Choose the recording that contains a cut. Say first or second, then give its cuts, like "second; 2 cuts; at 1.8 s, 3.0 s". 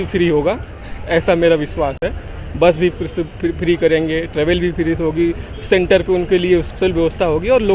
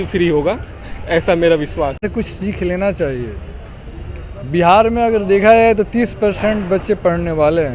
second; 1 cut; at 2.0 s